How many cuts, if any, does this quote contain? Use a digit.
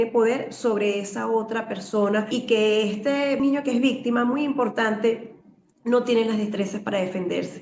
2